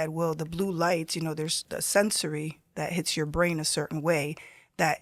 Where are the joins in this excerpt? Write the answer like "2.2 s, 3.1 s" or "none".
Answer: none